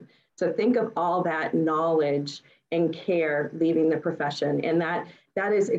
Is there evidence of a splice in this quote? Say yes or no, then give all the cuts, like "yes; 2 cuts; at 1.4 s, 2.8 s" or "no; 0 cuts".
no; 0 cuts